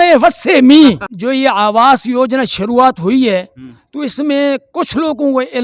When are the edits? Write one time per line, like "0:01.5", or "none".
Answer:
0:01.1